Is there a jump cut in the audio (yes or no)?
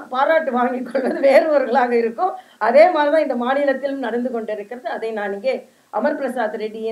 no